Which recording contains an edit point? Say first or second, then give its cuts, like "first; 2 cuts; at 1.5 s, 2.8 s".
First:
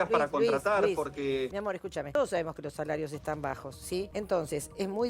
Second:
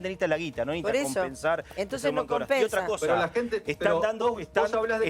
first; 2 cuts; at 1.8 s, 4.1 s